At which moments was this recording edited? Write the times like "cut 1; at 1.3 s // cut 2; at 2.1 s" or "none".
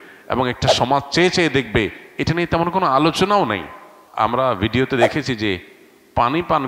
cut 1; at 4.0 s